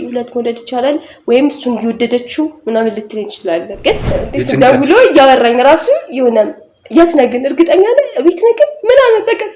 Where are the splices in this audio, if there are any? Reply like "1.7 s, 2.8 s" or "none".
4.0 s